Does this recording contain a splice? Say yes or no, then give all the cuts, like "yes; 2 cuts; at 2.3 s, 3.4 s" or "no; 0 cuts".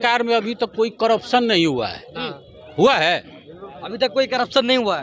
no; 0 cuts